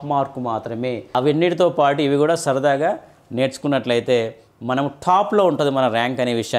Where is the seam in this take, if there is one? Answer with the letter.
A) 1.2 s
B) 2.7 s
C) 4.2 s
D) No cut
A